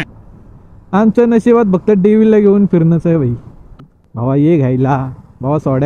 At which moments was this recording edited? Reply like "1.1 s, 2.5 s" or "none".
3.8 s